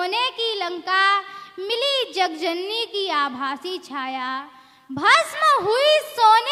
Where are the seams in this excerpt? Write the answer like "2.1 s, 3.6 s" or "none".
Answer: none